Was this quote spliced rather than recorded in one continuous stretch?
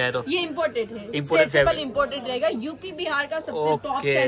no; 0 cuts

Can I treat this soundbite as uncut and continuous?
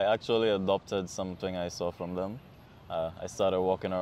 yes; 0 cuts

